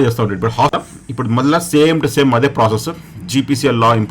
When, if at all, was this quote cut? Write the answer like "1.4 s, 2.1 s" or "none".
0.9 s